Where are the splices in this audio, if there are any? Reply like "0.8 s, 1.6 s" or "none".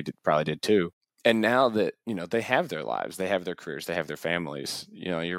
1.0 s, 2.0 s

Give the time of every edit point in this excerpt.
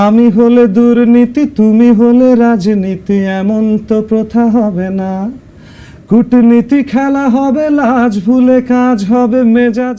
none

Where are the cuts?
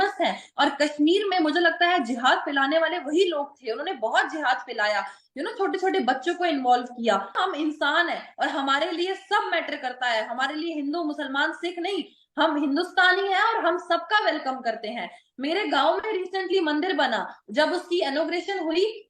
7.3 s

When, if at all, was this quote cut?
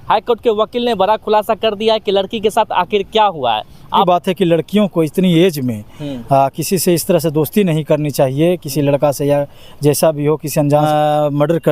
4.0 s, 10.9 s

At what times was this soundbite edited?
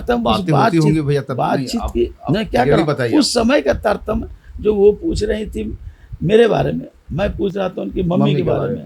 none

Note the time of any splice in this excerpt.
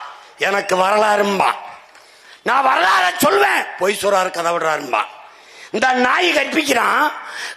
none

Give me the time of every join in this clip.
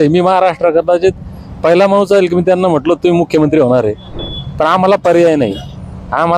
4.1 s

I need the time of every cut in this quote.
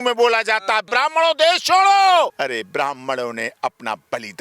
0.9 s, 2.3 s

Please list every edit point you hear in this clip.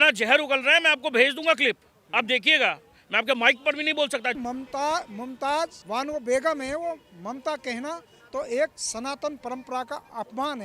4.4 s, 5.8 s

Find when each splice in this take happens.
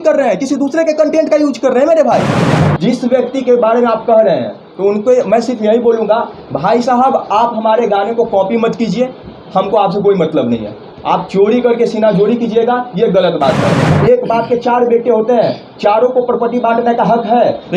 2.4 s, 13.9 s

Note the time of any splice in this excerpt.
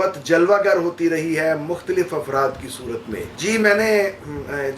none

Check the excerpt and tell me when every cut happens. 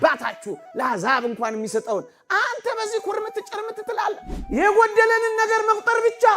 4.3 s

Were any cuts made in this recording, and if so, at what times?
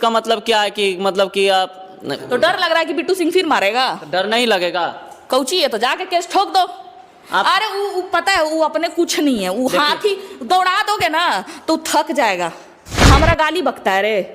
13.0 s

